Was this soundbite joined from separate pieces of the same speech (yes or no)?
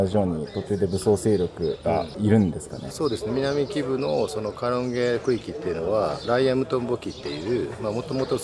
no